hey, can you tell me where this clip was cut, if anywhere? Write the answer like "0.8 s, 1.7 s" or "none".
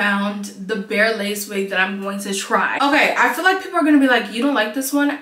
2.8 s